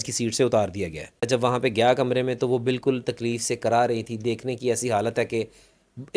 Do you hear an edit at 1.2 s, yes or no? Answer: yes